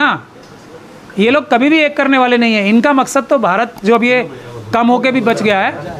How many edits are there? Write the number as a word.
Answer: zero